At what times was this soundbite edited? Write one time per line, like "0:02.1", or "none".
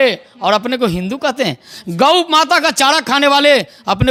none